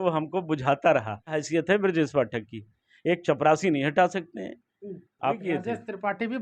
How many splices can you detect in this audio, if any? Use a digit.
2